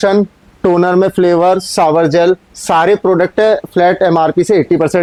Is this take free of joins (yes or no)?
yes